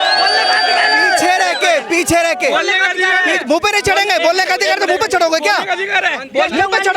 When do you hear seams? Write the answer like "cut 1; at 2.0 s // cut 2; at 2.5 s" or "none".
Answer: none